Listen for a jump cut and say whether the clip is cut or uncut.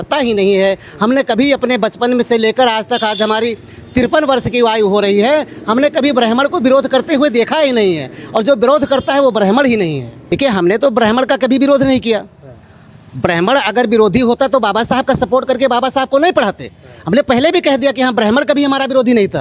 cut